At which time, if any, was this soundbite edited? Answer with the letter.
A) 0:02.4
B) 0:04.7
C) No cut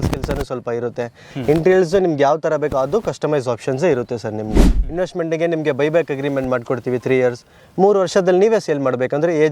B